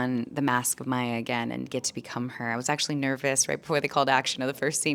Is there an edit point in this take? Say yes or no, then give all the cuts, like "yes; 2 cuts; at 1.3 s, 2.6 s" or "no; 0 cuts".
no; 0 cuts